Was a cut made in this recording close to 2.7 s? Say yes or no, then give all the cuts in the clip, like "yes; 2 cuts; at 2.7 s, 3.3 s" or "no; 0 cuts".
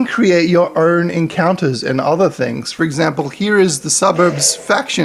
yes; 1 cut; at 2.7 s